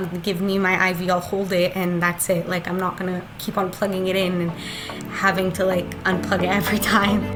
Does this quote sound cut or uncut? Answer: uncut